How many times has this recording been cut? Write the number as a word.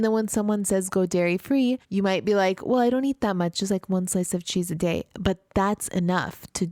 one